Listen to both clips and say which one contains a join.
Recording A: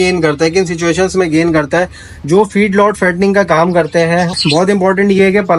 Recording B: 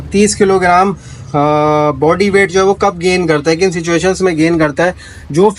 A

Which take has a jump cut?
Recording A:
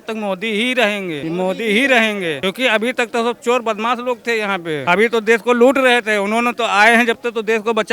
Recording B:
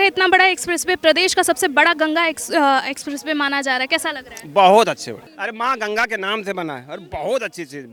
A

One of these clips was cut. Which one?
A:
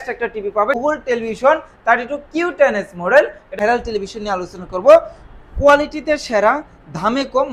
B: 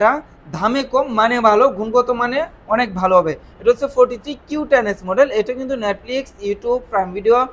A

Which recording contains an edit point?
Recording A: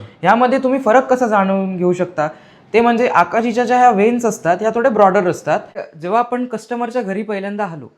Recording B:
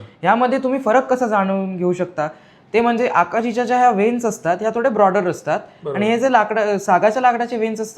A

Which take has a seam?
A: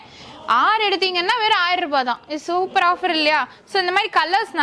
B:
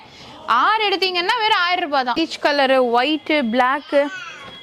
B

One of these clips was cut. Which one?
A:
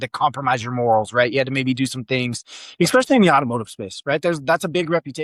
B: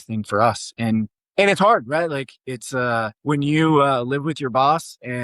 B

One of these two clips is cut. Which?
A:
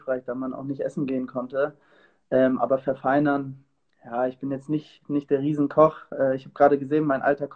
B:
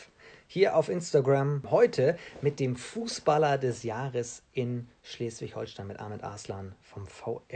B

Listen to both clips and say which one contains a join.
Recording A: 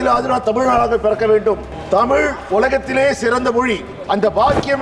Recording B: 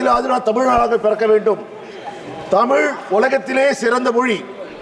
A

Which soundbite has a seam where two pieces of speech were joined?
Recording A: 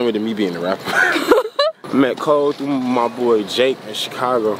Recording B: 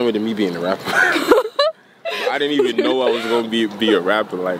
A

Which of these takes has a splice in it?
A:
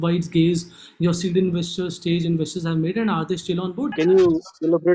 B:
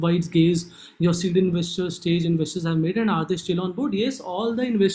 A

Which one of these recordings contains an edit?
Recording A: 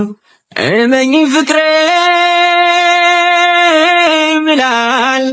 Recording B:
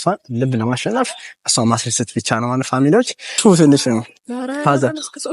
B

